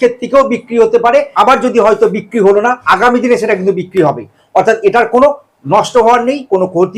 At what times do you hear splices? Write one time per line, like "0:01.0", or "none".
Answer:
0:01.3
0:02.8